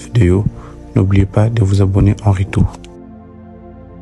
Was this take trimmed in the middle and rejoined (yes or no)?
yes